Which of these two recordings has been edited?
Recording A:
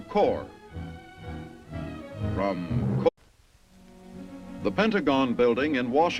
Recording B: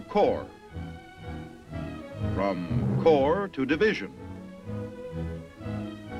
B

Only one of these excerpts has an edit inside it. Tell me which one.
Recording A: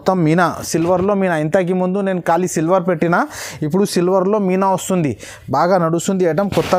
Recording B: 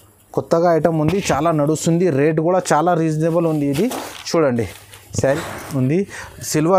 B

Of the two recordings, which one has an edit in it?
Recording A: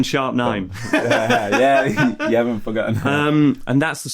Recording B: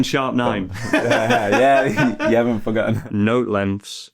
B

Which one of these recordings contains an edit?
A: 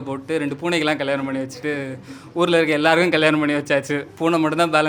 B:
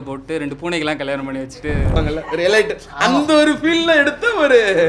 B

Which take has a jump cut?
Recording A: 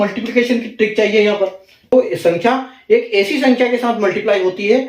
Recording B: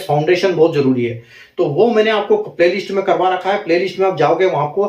A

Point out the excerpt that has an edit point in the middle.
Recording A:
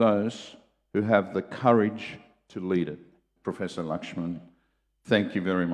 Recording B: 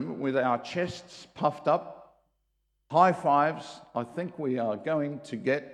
A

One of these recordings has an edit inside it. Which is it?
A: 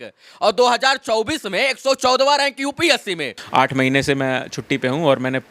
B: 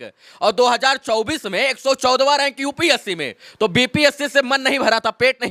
A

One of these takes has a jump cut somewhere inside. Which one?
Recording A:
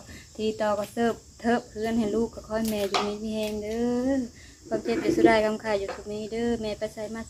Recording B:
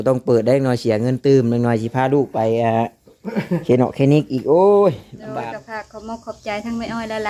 B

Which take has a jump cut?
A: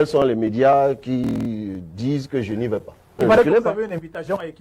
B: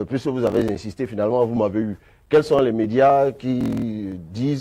A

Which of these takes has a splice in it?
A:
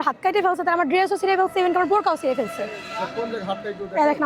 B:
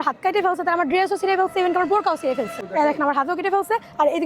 B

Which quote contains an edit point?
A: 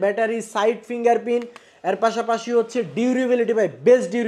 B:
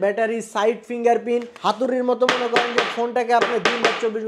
B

